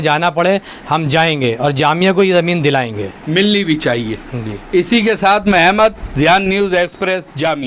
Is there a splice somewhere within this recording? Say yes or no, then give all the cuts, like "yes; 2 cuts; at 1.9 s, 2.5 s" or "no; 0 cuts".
no; 0 cuts